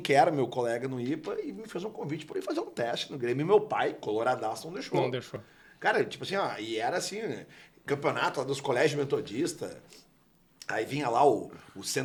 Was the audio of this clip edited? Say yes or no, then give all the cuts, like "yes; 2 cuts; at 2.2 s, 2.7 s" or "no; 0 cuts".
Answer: no; 0 cuts